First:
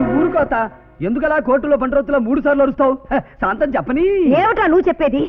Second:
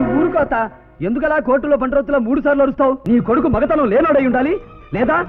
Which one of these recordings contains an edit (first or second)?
second